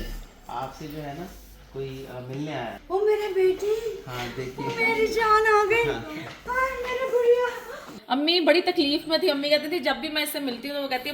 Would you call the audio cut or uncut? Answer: cut